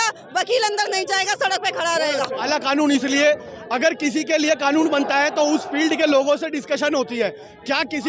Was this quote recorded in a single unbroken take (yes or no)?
no